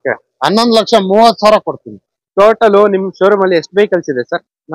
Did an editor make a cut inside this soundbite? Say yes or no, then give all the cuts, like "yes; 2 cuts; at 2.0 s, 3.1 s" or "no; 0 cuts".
yes; 1 cut; at 2.2 s